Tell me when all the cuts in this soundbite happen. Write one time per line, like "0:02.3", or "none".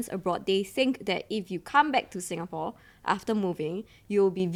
none